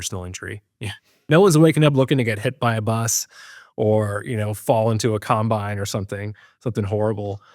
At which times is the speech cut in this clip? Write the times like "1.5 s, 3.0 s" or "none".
1.1 s